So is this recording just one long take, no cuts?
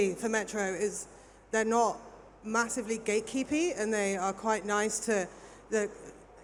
yes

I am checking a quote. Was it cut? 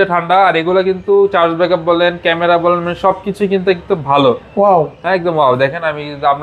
no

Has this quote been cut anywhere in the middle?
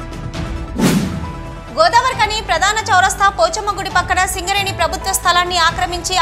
no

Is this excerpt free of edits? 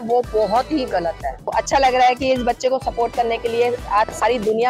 no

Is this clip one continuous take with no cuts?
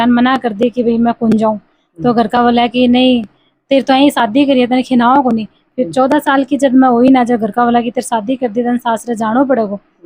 yes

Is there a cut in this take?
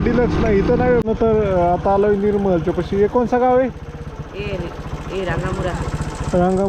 yes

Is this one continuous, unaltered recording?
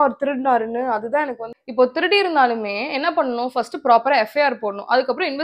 no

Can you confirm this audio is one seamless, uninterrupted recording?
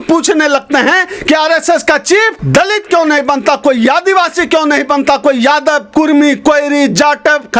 no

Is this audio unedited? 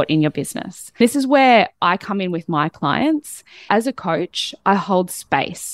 no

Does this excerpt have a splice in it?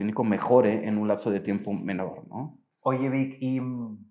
yes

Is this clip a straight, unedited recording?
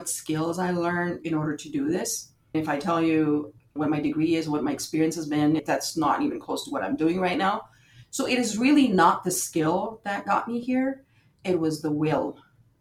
no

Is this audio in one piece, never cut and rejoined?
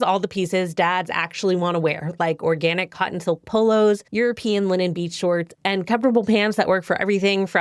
yes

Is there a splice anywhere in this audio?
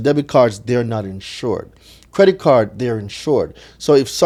no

